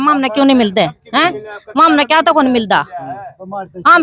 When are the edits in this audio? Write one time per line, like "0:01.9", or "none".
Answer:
none